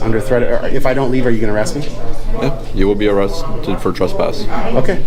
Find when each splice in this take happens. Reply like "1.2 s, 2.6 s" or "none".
none